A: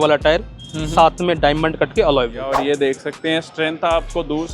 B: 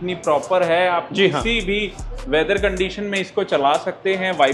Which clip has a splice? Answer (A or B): A